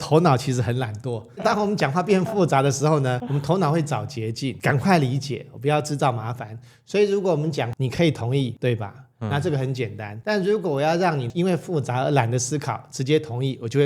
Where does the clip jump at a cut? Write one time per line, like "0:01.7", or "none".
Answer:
0:01.4
0:03.2
0:04.6
0:07.7
0:08.5
0:10.1
0:11.3

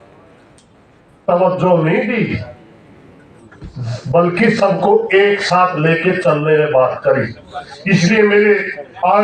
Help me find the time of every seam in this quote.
none

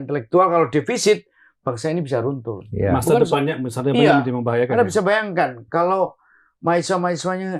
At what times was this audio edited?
none

